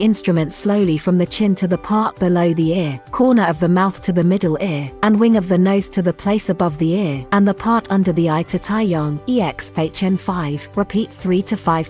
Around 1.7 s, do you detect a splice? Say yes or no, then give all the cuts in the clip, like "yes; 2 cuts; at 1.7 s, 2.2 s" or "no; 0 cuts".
no; 5 cuts; at 3.0 s, 4.8 s, 7.2 s, 9.2 s, 10.6 s